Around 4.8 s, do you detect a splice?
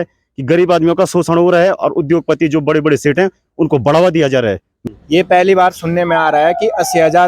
yes; 1 cut; at 4.8 s

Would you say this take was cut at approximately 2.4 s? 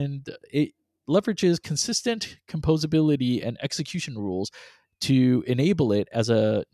no; 0 cuts

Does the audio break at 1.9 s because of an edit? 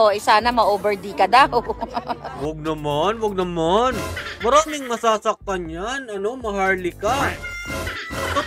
no; 0 cuts

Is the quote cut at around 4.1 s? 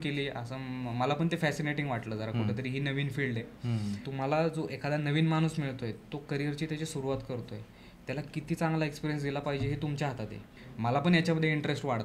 yes; 2 cuts; at 4.1 s, 10.6 s

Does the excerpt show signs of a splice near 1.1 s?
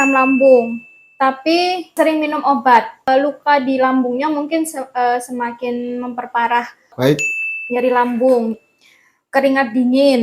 no; 1 cut; at 6.9 s

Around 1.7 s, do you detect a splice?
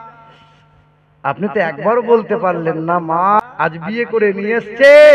no; 1 cut; at 3.4 s

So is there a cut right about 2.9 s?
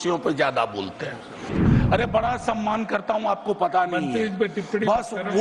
no; 1 cut; at 1.5 s

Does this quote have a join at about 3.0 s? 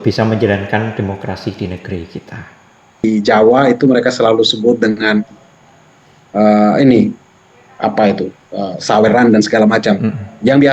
yes; 1 cut; at 3.0 s

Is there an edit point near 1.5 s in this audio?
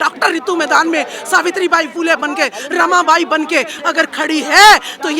no; 1 cut; at 3.7 s

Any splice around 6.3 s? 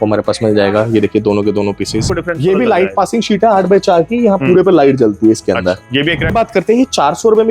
yes; 2 cuts; at 2.1 s, 6.3 s

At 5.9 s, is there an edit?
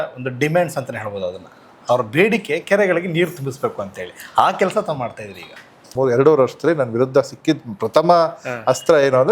yes; 1 cut; at 5.9 s

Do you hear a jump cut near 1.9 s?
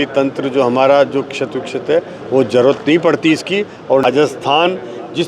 no; 1 cut; at 4.0 s

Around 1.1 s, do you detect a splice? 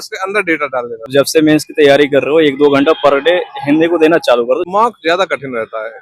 yes; 2 cuts; at 1.1 s, 4.6 s

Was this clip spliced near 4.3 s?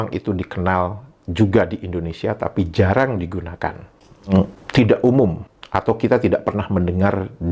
yes; 1 cut; at 4.3 s

